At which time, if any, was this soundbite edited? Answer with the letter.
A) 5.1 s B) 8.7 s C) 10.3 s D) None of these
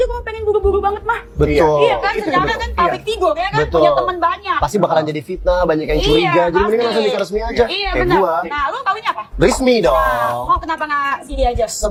D